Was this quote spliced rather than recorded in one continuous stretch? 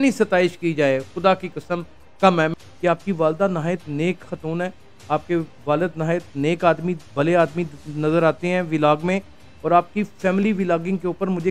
yes; 1 cut; at 2.5 s

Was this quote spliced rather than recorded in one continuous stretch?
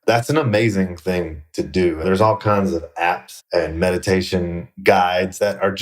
yes; 2 cuts; at 2.0 s, 3.3 s

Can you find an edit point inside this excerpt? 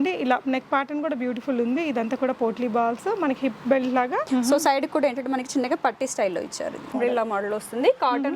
yes; 2 cuts; at 4.2 s, 6.9 s

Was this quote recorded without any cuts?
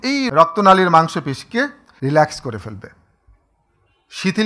no; 1 cut; at 1.9 s

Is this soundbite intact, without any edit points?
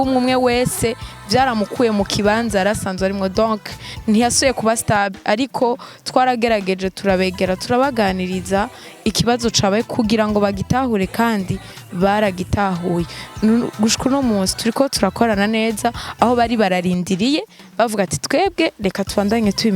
yes; 0 cuts

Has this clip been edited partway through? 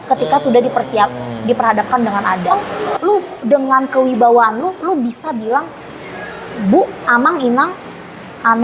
yes; 1 cut; at 2.5 s

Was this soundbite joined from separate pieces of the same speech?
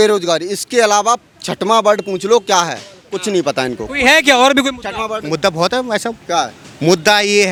no; 0 cuts

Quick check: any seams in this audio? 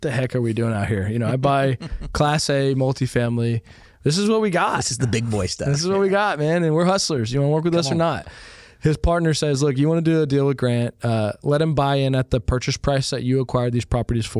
no; 0 cuts

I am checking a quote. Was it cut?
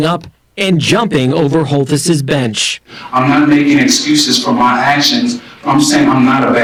no; 0 cuts

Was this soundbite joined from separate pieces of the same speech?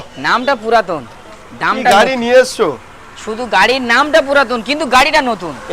no; 0 cuts

